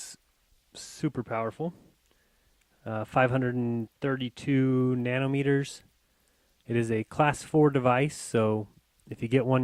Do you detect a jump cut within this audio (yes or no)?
no